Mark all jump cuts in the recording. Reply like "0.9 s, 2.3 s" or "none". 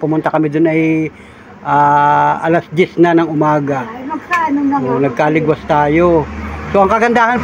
none